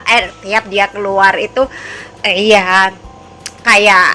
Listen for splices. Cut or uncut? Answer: uncut